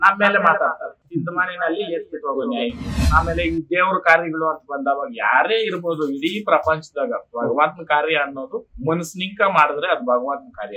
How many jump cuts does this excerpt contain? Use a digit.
2